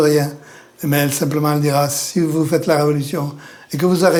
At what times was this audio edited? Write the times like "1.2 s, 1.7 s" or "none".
none